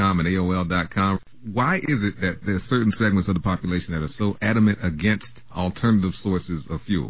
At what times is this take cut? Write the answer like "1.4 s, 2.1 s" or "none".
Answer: 1.2 s